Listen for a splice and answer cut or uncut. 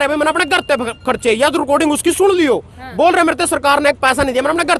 uncut